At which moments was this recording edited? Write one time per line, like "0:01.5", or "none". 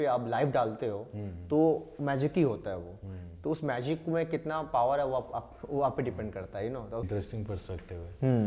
0:07.1